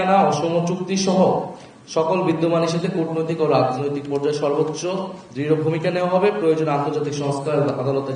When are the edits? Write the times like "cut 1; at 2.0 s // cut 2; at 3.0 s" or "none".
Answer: none